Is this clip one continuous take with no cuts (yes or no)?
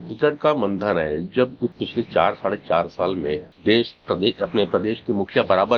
no